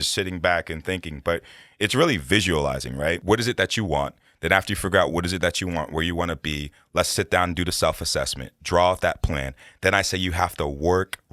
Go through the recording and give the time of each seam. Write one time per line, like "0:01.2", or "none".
0:03.2